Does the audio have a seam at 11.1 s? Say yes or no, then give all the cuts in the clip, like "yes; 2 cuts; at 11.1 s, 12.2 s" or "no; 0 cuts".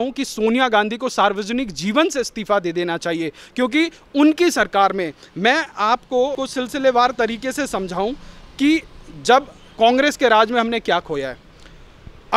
no; 1 cut; at 6.4 s